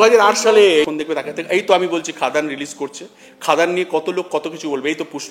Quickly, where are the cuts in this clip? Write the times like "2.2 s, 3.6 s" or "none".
0.9 s